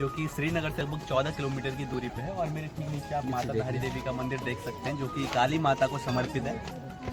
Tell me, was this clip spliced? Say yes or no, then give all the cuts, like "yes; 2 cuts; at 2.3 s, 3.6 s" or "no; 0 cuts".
no; 0 cuts